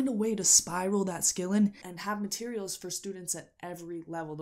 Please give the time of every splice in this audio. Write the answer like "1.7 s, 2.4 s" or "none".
1.9 s